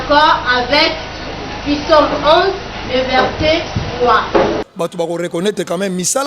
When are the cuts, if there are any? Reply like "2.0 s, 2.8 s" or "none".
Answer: 4.6 s